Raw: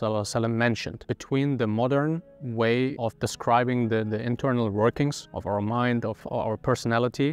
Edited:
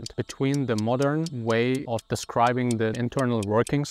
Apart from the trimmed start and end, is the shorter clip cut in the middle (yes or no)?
yes